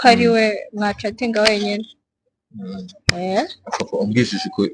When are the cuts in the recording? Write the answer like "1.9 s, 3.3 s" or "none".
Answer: none

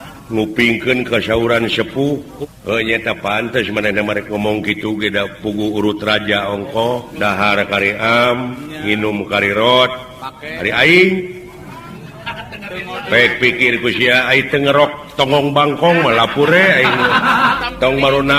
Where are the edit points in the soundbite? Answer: 2.3 s, 7.1 s, 17.5 s

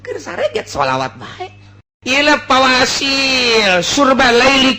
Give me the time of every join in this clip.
1.9 s

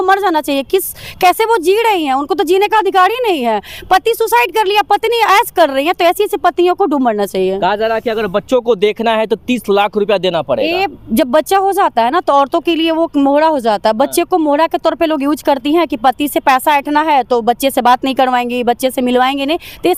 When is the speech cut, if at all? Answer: none

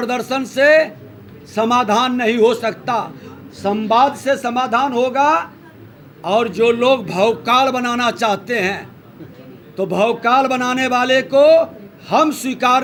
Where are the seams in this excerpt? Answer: none

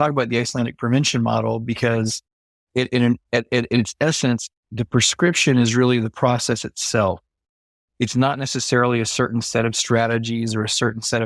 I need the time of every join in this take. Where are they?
none

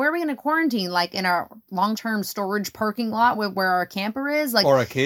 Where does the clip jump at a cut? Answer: 2.0 s

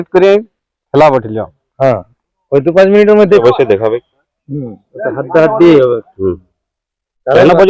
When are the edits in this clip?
3.4 s

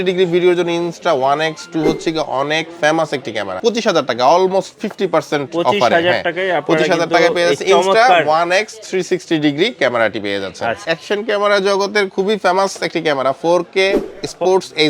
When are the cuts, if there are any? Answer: 3.5 s, 10.8 s

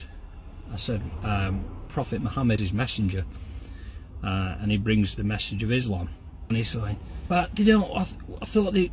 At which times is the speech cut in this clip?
2.6 s, 6.5 s, 7.2 s

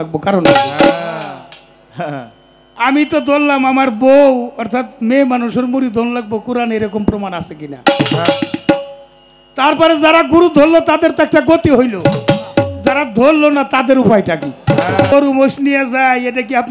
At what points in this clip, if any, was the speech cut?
15.1 s

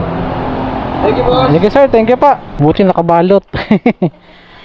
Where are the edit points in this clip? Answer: 2.6 s

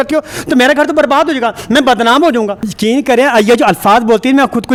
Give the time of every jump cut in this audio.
none

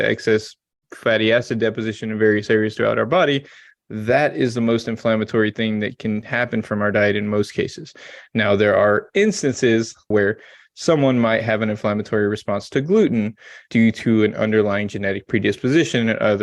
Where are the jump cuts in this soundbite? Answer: 10.1 s, 13.6 s

